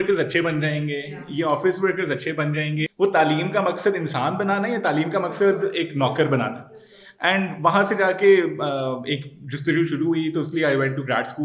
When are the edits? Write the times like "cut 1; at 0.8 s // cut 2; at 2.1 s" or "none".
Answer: cut 1; at 2.9 s